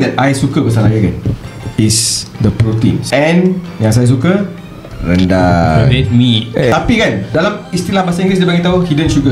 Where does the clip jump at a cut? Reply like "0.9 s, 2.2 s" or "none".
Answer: 3.0 s, 6.7 s